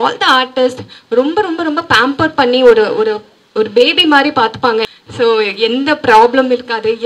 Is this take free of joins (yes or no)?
no